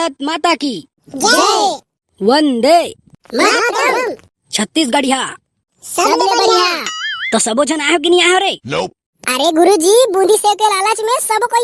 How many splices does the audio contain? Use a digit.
0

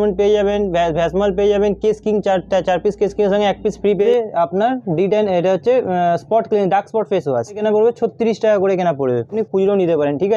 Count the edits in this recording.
3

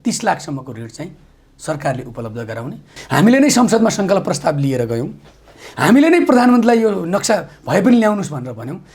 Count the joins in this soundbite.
1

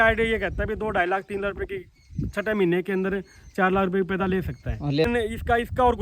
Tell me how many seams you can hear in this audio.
1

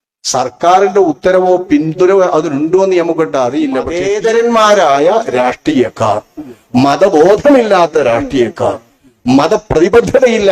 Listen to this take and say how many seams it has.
1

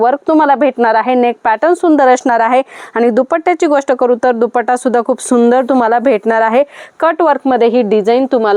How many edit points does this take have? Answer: 0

